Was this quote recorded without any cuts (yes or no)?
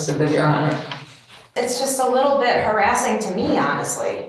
no